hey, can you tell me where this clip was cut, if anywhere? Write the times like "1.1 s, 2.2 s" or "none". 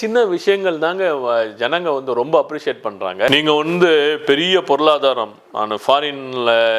none